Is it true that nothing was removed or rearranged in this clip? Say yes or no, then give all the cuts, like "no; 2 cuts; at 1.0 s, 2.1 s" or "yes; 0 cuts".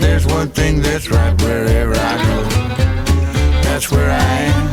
yes; 0 cuts